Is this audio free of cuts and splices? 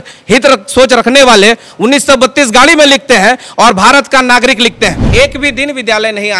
no; 1 cut; at 5.0 s

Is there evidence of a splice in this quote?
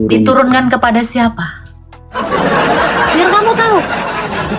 yes; 1 cut; at 2.1 s

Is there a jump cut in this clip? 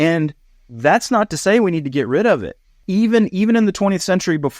yes; 1 cut; at 2.8 s

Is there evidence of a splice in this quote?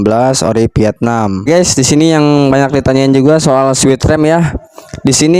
yes; 1 cut; at 1.5 s

